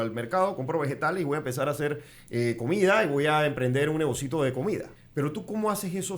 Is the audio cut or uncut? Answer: cut